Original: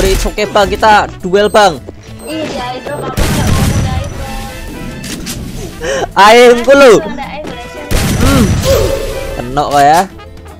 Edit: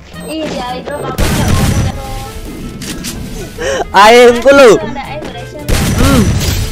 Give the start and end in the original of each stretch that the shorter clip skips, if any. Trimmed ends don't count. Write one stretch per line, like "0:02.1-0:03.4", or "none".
0:03.9-0:04.1